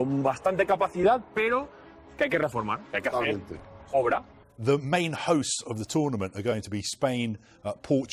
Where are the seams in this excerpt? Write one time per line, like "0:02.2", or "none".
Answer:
0:04.4